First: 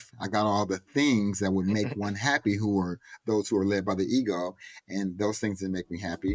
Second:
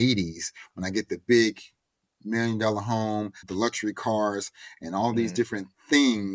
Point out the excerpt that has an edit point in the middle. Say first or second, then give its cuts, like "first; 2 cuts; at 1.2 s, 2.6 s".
second; 1 cut; at 3.4 s